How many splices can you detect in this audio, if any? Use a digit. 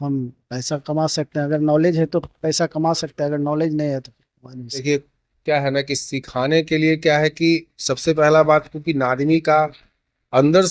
1